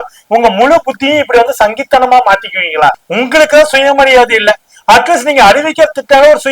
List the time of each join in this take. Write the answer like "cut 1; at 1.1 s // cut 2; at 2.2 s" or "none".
cut 1; at 3.0 s

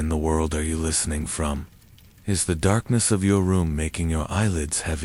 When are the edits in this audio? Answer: none

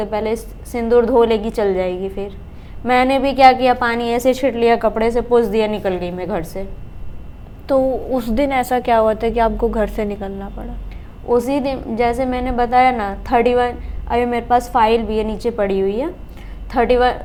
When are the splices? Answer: none

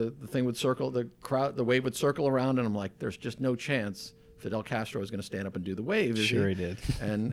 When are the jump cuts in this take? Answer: none

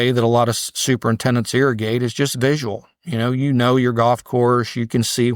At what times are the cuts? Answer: none

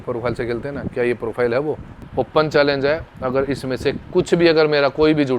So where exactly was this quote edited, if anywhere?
cut 1; at 2.0 s

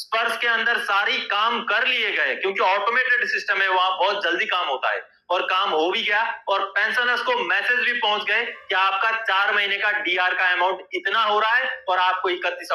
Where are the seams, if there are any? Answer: none

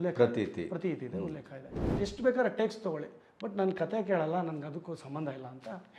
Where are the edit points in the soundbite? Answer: cut 1; at 1.9 s

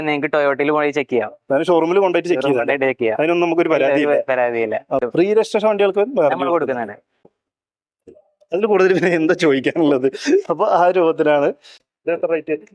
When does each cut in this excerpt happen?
cut 1; at 5.0 s // cut 2; at 11.7 s

